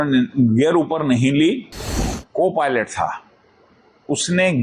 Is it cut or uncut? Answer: cut